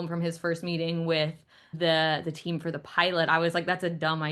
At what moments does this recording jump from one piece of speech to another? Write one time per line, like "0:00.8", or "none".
0:01.7